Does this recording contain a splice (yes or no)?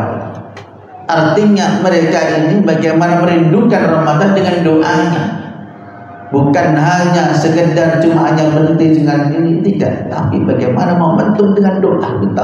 no